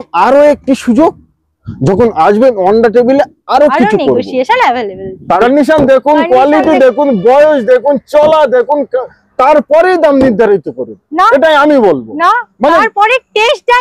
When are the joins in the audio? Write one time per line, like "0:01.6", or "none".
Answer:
0:05.4